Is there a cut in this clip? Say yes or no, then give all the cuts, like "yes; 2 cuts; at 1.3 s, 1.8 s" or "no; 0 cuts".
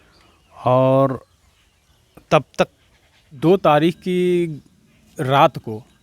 yes; 1 cut; at 3.4 s